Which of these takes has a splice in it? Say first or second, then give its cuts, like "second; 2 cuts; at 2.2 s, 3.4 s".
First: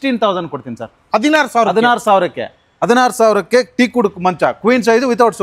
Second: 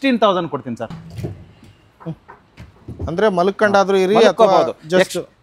second; 1 cut; at 0.9 s